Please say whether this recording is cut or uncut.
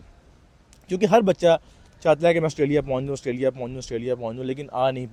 uncut